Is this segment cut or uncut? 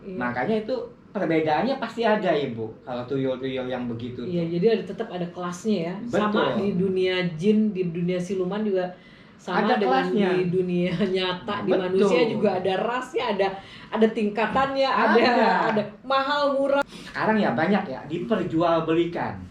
cut